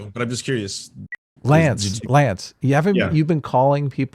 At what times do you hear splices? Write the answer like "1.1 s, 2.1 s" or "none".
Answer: 1.2 s